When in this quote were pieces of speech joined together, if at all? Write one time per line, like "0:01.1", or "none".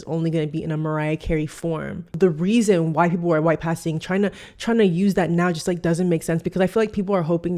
0:02.1